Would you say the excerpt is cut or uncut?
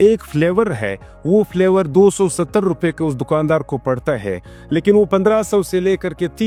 uncut